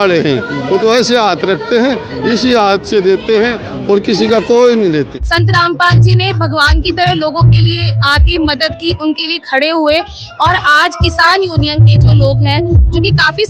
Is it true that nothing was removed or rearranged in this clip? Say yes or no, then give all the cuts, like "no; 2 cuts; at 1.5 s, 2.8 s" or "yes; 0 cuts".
no; 1 cut; at 5.2 s